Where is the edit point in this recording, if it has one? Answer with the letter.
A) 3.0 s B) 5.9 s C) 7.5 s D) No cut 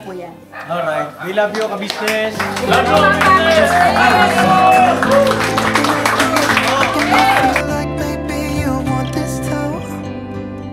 C